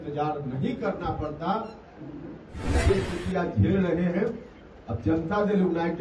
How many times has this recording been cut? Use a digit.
1